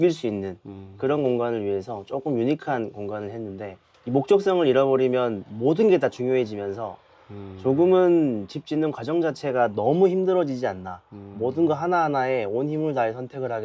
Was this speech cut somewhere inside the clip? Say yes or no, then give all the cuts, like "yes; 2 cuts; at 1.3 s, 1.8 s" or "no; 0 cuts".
no; 0 cuts